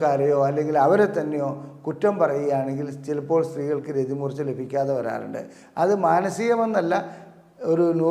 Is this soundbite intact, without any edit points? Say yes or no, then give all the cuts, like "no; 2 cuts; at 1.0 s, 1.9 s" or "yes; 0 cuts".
yes; 0 cuts